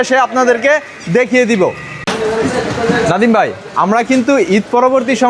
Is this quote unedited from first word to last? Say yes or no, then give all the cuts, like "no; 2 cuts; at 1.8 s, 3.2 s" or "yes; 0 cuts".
yes; 0 cuts